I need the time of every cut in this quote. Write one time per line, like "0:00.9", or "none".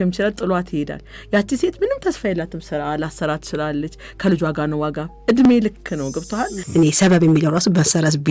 0:06.6

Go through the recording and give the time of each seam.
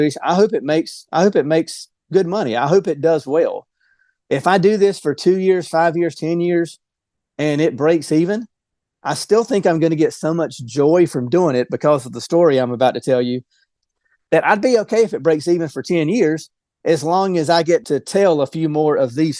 0:13.8
0:17.8

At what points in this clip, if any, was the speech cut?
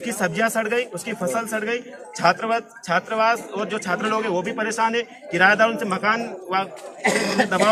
none

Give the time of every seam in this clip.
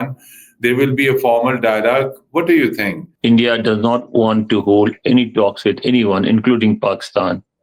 0:03.0

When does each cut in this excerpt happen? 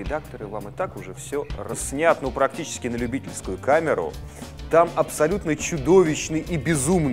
none

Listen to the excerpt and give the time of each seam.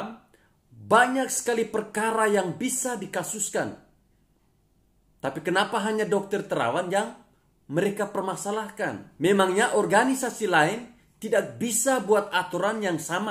0:09.0

